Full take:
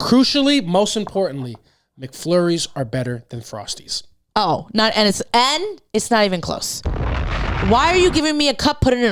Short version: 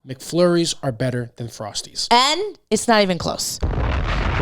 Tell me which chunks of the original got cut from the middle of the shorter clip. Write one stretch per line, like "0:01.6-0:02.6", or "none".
0:03.9-0:05.2